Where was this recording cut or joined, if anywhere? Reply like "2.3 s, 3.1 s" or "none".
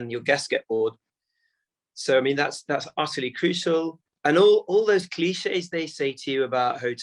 4.0 s

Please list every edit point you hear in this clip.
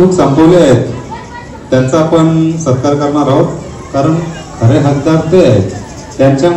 none

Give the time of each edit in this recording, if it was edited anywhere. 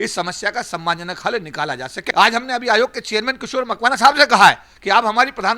1.9 s

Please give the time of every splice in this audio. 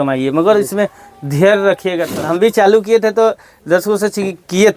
2.1 s

